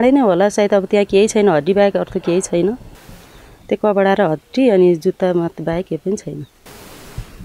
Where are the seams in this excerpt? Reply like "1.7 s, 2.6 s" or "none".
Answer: none